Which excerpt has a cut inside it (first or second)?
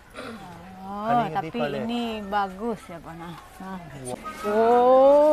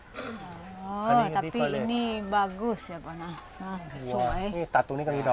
first